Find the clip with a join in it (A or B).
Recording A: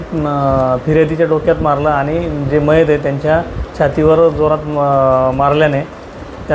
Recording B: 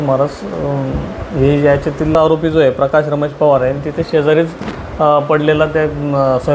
B